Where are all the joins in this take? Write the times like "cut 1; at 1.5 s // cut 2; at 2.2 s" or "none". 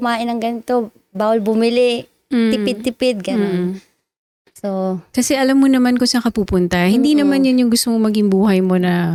none